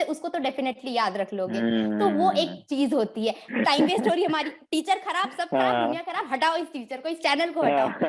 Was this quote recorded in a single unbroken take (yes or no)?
no